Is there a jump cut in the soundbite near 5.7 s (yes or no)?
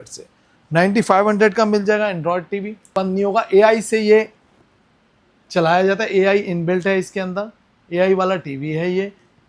no